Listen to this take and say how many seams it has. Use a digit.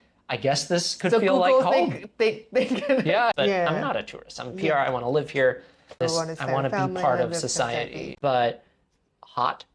2